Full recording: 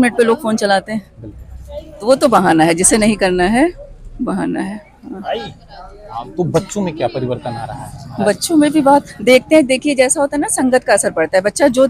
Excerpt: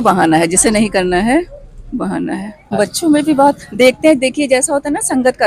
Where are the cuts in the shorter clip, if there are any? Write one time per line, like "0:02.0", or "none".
0:02.6